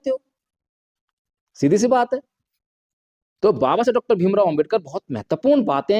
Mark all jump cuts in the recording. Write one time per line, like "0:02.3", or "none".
none